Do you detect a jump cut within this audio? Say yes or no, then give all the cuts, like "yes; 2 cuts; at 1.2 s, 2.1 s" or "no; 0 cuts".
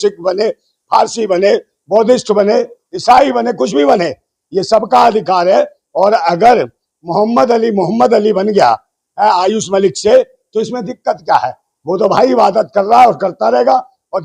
no; 0 cuts